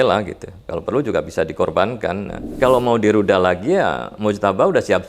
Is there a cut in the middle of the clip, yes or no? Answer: yes